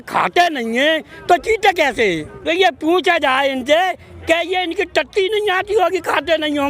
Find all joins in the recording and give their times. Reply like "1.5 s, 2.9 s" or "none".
2.3 s